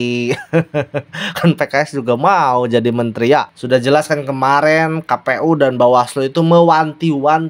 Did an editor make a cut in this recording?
yes; 1 cut; at 3.5 s

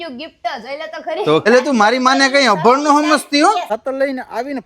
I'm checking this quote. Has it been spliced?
yes; 2 cuts; at 1.4 s, 3.6 s

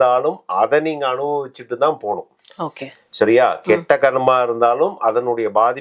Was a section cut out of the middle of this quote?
no; 0 cuts

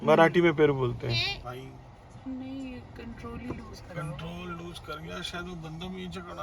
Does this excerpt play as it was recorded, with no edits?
no; 1 cut; at 1.4 s

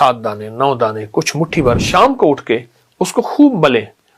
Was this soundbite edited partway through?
yes; 1 cut; at 1.8 s

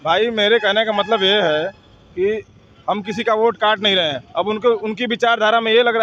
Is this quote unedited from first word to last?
yes; 0 cuts

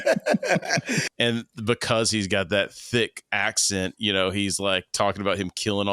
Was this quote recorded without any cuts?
no; 1 cut; at 1.0 s

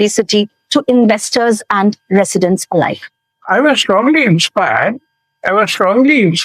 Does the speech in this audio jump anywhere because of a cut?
no; 0 cuts

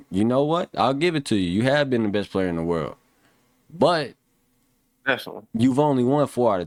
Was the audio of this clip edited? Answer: no; 0 cuts

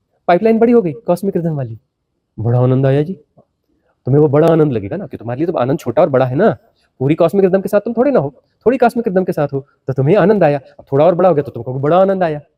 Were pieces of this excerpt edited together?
no; 0 cuts

